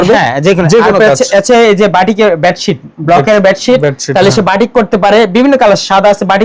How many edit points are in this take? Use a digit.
0